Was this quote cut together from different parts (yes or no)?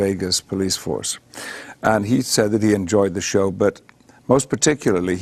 yes